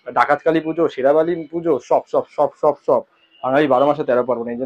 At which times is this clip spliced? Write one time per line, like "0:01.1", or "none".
none